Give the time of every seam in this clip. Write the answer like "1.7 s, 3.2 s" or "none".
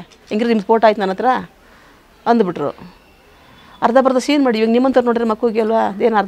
none